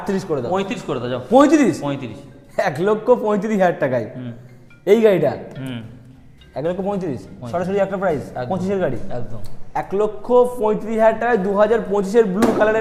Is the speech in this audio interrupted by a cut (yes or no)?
no